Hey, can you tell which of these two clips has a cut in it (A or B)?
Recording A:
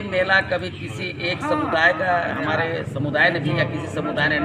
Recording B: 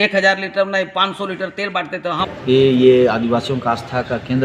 B